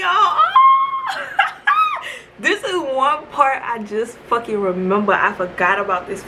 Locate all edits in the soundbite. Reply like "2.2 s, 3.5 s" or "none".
none